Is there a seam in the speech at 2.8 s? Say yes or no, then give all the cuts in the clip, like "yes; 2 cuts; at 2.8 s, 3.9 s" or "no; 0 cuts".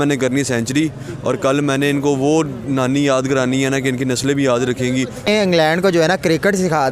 no; 1 cut; at 5.2 s